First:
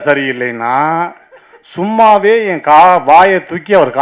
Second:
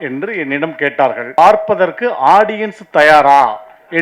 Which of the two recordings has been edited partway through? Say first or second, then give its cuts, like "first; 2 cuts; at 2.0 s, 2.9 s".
second; 1 cut; at 1.4 s